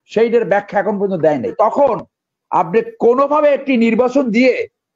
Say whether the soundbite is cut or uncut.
cut